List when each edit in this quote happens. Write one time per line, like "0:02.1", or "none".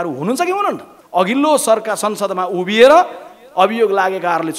0:00.9